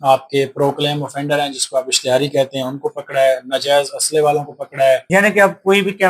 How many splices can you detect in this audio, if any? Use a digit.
1